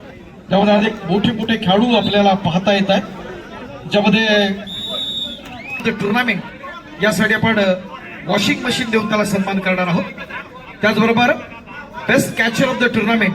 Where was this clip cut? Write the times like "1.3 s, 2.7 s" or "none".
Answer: 5.8 s